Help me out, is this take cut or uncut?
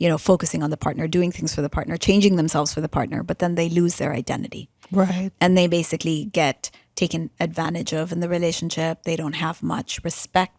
uncut